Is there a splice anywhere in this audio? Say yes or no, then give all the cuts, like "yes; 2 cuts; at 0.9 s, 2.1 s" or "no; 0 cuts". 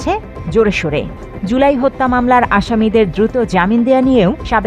yes; 1 cut; at 1.3 s